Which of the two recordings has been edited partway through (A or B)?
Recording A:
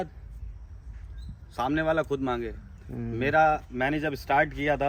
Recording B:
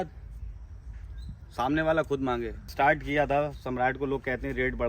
B